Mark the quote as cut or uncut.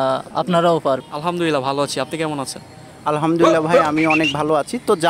cut